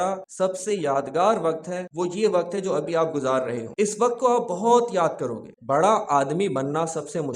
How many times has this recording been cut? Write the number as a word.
one